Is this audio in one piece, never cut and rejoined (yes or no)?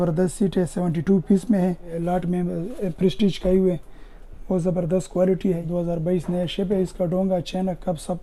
no